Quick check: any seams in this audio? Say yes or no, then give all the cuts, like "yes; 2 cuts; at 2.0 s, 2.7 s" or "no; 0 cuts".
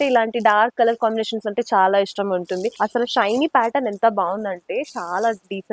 yes; 1 cut; at 2.7 s